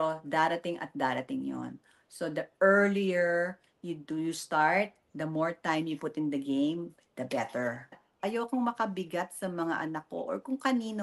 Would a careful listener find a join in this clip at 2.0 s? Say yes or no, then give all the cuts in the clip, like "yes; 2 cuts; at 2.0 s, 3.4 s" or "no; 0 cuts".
no; 1 cut; at 8.1 s